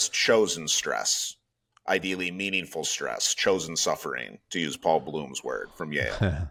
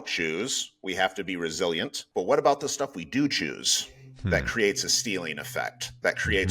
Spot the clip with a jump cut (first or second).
second